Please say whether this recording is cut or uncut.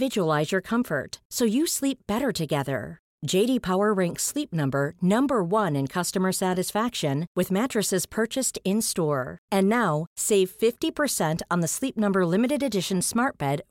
uncut